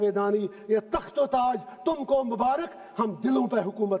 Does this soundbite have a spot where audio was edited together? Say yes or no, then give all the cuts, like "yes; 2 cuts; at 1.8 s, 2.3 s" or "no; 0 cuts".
no; 0 cuts